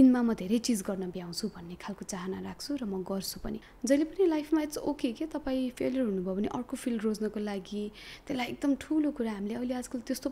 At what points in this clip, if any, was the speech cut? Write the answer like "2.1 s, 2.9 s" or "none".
3.6 s